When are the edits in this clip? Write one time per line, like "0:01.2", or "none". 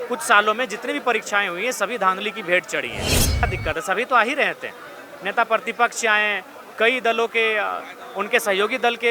0:03.4